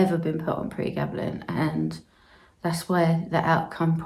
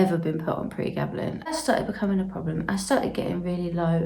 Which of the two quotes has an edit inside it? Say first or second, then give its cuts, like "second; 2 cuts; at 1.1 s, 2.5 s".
second; 1 cut; at 1.5 s